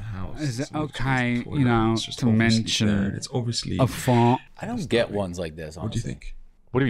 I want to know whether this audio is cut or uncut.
cut